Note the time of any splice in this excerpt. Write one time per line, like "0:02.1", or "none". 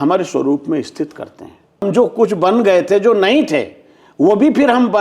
0:01.8